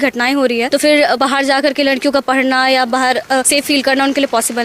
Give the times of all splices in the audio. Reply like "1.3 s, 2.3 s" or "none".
1.0 s, 3.5 s